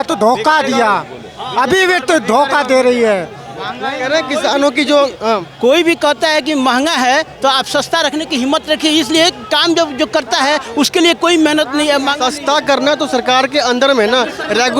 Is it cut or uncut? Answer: uncut